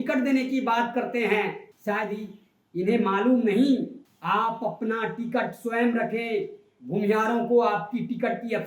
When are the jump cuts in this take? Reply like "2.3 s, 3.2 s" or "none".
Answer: 1.7 s, 4.1 s